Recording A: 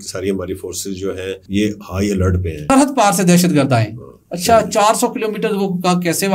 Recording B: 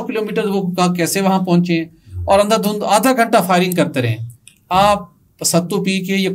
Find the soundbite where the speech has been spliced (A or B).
A